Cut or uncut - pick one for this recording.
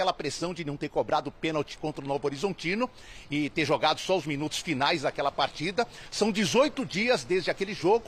uncut